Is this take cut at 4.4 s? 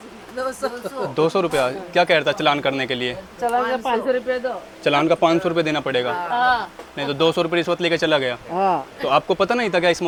no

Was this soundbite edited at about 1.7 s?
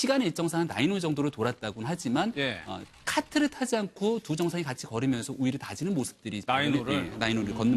no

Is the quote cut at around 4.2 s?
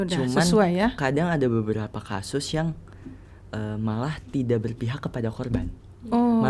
no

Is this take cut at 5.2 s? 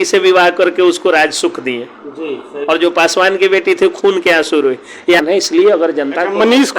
yes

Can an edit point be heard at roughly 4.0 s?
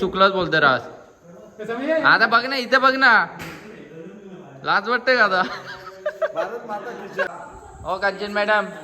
no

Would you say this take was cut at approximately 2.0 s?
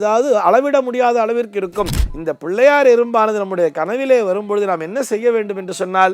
yes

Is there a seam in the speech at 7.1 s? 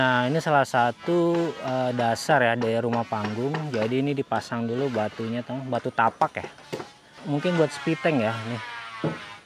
yes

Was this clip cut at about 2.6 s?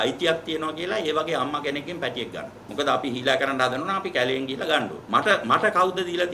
yes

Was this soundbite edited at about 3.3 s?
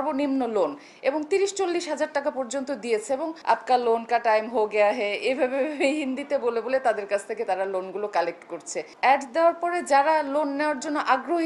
yes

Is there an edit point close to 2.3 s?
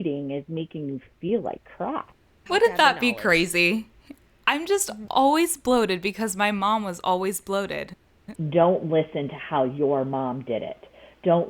yes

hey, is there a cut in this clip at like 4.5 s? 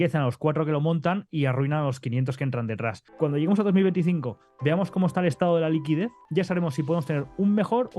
no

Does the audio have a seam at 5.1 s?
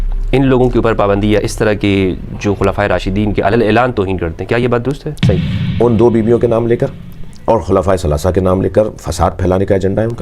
yes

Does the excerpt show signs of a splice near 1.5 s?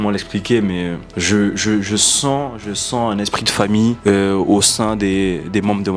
no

